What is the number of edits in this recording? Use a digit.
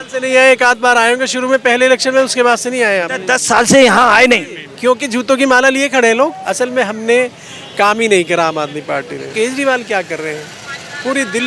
2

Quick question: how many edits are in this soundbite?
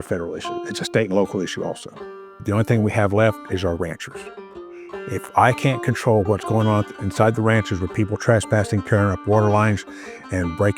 1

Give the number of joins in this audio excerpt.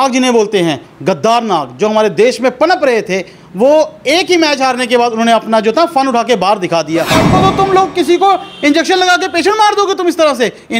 1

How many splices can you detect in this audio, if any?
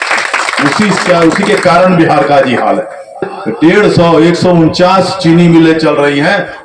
1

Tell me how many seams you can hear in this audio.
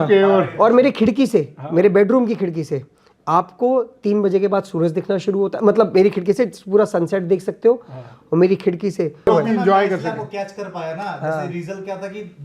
1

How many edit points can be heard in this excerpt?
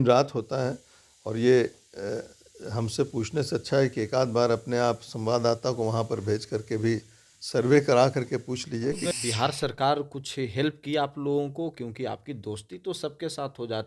1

